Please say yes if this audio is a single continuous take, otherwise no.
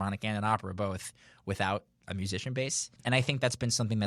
no